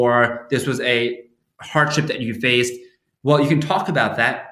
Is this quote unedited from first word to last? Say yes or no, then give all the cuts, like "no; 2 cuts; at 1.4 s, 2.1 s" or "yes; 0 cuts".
yes; 0 cuts